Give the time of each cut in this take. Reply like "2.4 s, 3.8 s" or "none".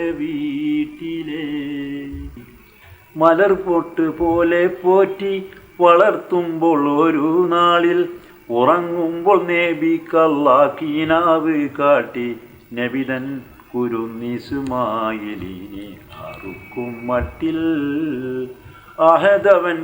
2.4 s